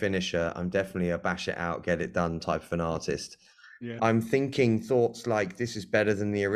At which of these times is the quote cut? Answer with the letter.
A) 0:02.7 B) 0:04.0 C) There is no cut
B